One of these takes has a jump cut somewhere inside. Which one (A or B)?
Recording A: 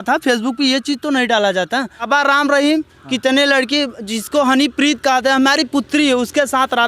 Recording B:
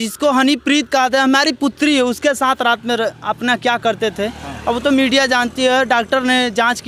A